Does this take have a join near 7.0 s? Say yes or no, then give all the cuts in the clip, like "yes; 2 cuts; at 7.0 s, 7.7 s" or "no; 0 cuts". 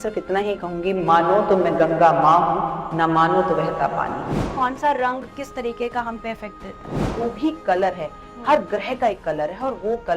yes; 2 cuts; at 4.4 s, 7.0 s